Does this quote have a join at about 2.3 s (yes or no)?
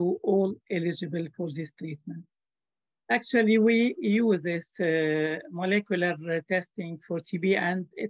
yes